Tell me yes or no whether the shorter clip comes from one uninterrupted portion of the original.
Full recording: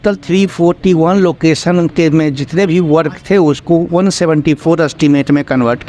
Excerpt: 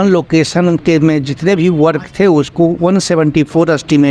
yes